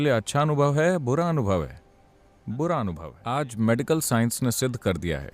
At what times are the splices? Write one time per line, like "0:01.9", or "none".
0:03.1